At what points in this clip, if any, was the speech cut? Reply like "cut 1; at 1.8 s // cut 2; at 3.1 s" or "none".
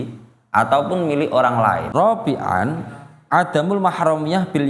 cut 1; at 1.9 s